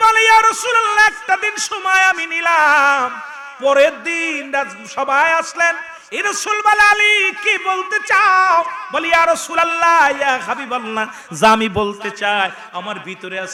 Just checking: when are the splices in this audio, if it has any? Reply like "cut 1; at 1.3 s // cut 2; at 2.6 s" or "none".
none